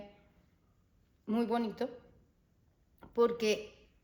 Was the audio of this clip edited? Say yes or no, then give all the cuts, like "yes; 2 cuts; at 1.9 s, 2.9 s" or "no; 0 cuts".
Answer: no; 0 cuts